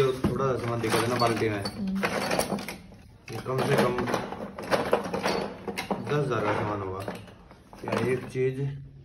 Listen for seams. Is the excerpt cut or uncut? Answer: uncut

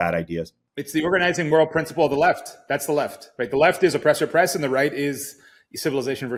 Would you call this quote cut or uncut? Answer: uncut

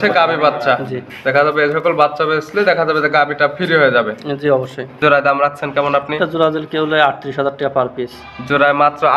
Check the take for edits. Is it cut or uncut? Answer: cut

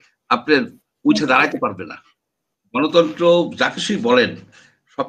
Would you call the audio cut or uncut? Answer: uncut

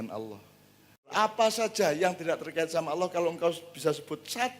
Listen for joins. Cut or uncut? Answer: cut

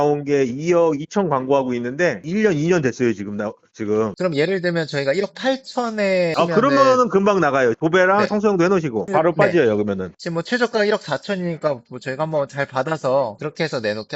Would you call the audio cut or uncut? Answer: uncut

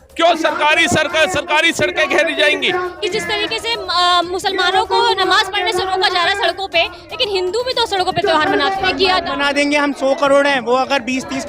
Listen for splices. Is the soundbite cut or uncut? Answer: cut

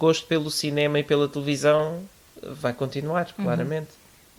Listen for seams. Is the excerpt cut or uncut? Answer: uncut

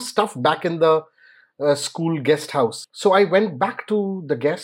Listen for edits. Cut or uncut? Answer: cut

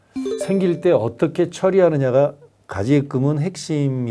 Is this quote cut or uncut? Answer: uncut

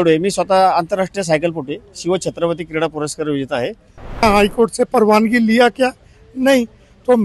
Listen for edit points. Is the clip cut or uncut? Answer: cut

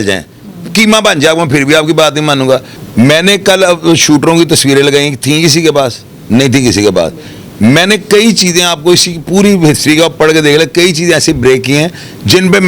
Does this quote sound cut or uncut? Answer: cut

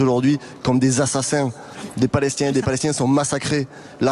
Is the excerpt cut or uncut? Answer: cut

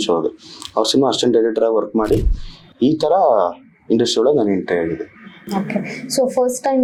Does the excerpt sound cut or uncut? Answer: uncut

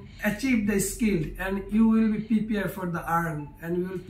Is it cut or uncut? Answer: uncut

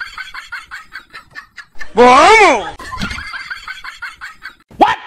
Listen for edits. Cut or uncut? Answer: uncut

